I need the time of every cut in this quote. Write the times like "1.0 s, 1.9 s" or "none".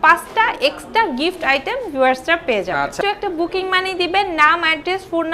3.0 s